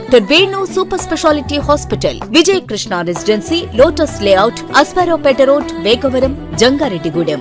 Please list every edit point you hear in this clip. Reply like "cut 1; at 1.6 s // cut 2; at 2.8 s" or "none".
none